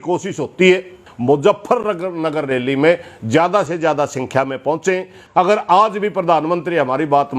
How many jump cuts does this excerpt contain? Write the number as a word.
two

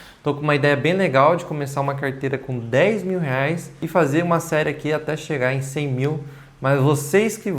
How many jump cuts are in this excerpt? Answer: one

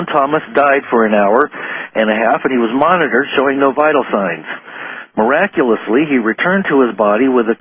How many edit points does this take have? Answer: one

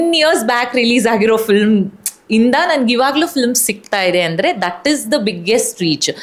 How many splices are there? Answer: zero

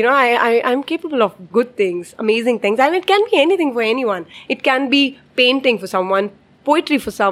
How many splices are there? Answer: one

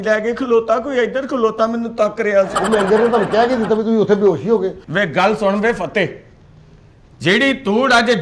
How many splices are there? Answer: one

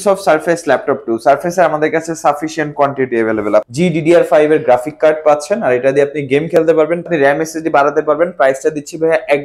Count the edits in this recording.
two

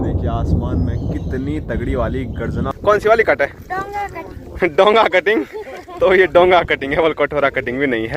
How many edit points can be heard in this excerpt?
one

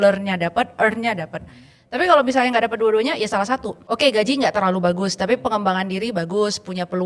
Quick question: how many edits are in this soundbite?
one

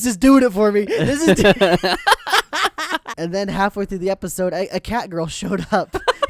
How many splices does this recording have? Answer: one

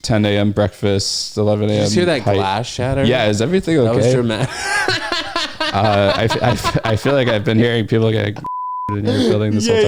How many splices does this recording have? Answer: zero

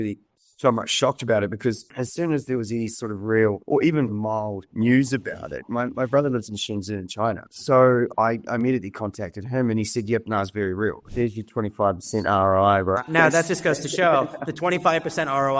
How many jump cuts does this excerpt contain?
one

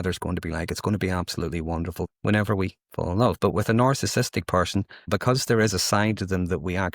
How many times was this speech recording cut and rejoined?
two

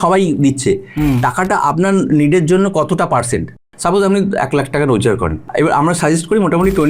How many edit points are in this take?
two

